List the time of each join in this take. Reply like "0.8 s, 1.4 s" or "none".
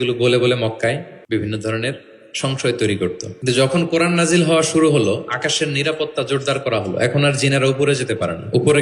1.1 s, 3.3 s